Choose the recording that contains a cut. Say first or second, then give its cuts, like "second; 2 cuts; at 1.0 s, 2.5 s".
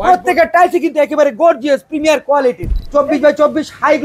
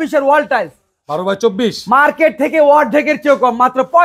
first; 1 cut; at 2.6 s